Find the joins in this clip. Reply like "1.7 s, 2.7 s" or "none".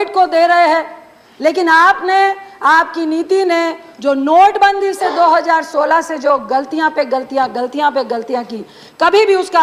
none